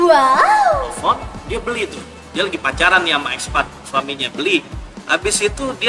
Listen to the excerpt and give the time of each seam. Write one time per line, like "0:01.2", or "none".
0:00.9

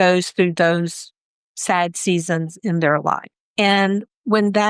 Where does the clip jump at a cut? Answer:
0:03.4

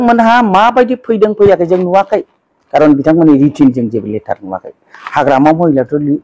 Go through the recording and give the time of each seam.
none

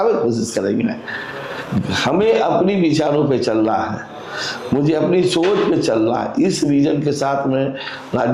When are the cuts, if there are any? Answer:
none

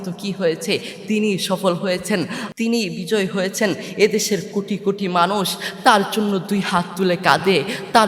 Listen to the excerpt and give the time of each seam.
0:02.4

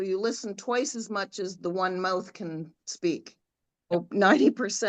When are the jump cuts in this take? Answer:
0:03.9

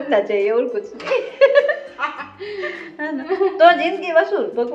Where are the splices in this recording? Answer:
none

